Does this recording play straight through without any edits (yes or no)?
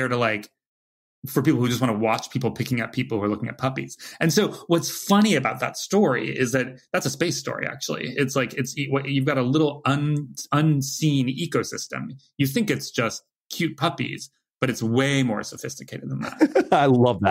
no